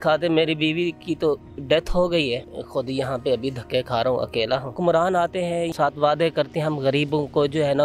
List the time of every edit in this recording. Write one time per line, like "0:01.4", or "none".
0:02.5
0:04.7
0:05.7